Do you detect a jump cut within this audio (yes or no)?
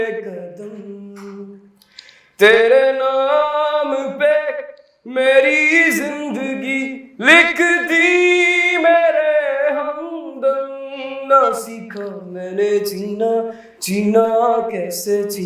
no